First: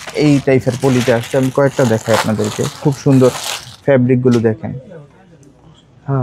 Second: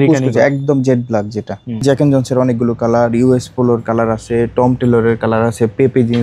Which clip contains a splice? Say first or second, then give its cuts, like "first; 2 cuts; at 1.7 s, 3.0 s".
second; 1 cut; at 1.8 s